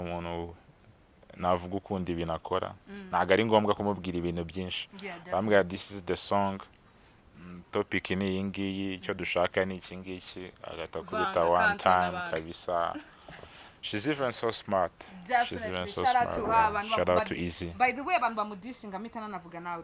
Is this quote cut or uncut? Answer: uncut